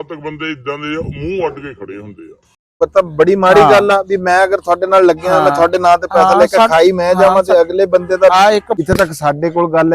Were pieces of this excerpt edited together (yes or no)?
yes